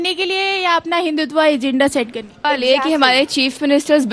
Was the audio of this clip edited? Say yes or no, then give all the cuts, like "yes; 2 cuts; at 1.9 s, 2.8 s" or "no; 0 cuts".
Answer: yes; 1 cut; at 2.4 s